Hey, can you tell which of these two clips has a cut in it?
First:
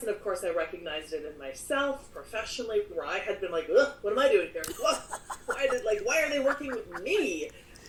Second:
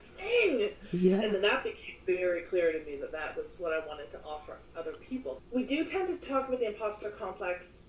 second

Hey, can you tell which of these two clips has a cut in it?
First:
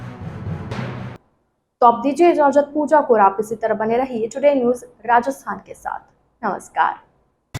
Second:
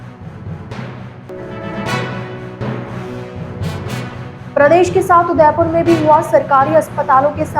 second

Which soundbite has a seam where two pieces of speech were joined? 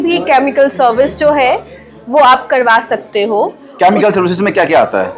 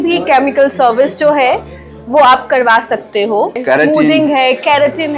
second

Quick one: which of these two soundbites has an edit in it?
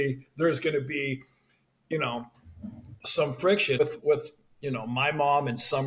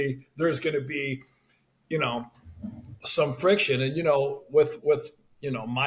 first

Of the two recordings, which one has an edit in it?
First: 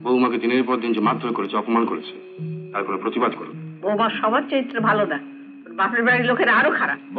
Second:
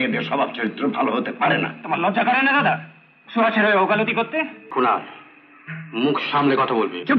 second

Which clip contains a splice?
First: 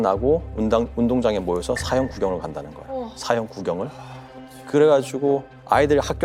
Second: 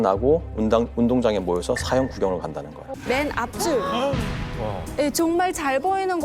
second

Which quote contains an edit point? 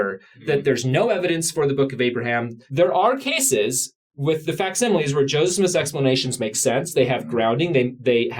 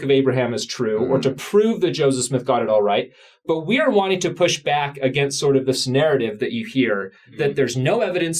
first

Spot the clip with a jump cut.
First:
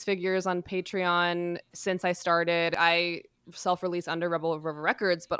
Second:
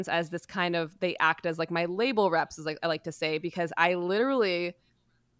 first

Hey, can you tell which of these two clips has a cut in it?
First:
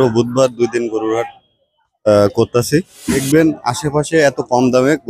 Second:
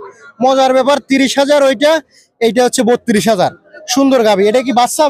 first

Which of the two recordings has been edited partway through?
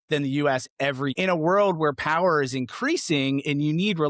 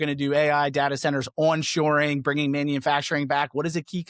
first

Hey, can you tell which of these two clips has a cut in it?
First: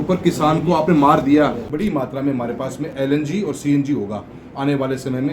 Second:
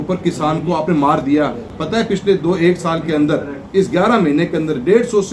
first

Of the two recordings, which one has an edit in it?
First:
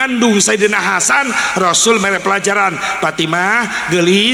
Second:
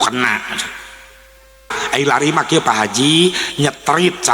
second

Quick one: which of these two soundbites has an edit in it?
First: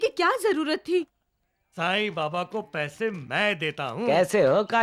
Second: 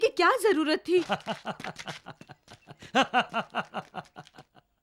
first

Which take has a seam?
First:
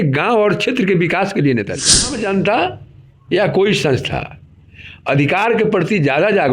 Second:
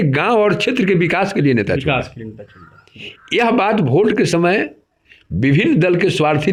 first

